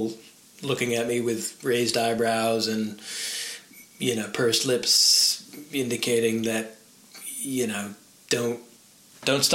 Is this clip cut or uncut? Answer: uncut